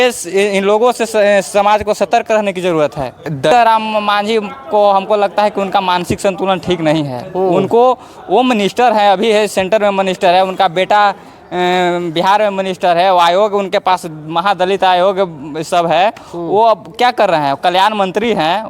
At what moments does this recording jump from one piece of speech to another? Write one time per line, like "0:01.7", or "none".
0:03.5